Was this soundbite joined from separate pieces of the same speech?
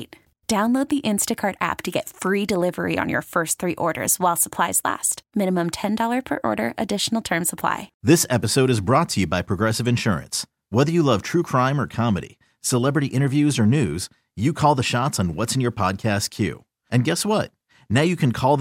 yes; 1 cut; at 7.9 s

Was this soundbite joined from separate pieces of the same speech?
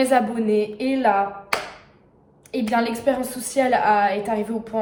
no; 0 cuts

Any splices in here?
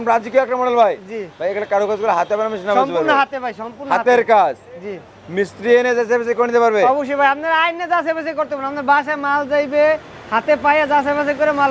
no; 0 cuts

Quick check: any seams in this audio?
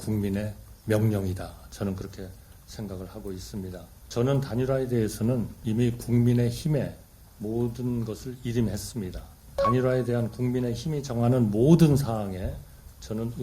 yes; 3 cuts; at 3.9 s, 5.6 s, 9.6 s

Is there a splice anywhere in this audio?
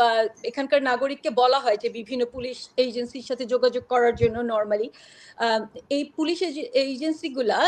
no; 0 cuts

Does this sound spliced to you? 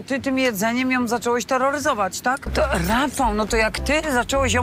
yes; 1 cut; at 2.5 s

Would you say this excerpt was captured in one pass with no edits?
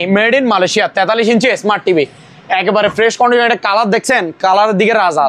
yes; 0 cuts

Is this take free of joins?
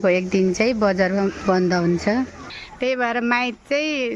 no; 1 cut; at 2.4 s

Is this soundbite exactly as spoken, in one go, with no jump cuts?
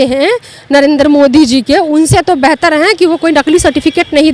yes; 0 cuts

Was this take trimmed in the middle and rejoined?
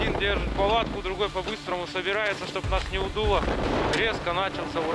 yes; 1 cut; at 3.6 s

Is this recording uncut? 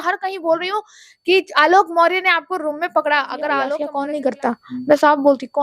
no; 1 cut; at 3.9 s

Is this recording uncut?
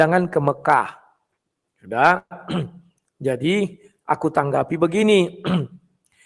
yes; 0 cuts

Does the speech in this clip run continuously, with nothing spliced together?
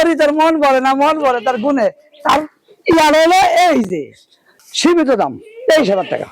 no; 1 cut; at 4.9 s

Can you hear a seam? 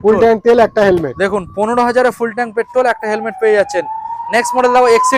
no; 0 cuts

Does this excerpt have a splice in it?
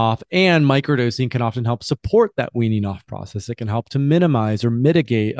no; 0 cuts

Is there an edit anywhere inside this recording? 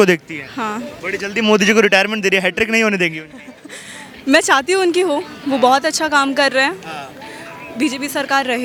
no; 0 cuts

